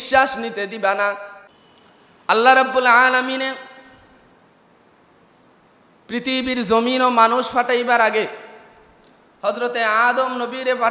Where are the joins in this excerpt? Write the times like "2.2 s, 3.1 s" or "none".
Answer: 1.5 s